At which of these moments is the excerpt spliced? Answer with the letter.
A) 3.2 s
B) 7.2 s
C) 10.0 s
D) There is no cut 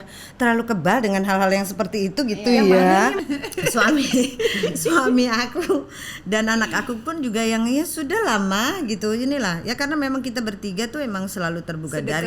A